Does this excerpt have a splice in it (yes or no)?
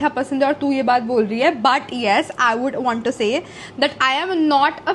no